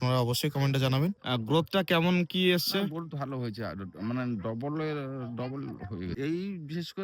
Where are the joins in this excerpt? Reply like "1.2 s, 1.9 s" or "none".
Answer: 1.2 s, 6.1 s